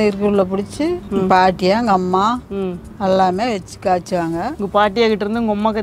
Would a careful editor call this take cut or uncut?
uncut